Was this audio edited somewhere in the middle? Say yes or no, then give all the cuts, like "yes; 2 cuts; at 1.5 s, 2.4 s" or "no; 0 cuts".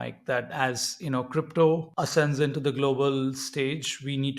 yes; 1 cut; at 1.9 s